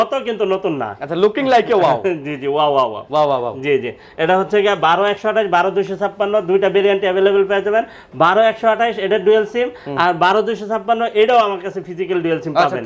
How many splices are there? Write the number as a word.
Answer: zero